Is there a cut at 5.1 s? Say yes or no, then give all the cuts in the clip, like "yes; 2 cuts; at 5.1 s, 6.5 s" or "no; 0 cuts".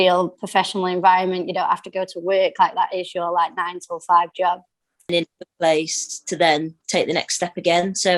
yes; 1 cut; at 5.1 s